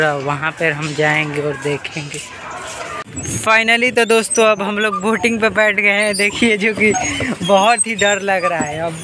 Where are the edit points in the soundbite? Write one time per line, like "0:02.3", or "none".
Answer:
0:03.1